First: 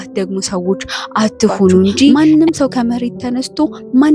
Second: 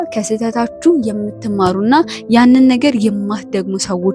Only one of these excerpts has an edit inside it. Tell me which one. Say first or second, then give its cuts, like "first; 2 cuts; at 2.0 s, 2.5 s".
first; 1 cut; at 2.1 s